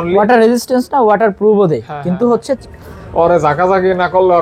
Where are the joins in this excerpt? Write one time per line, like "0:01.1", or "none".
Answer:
0:02.6